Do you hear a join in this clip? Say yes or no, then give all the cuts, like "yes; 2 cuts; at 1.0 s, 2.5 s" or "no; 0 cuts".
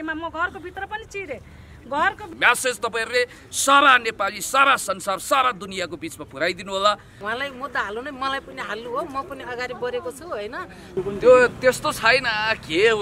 yes; 3 cuts; at 2.3 s, 7.2 s, 11.0 s